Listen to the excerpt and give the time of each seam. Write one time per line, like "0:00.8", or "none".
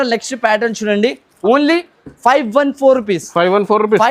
0:01.3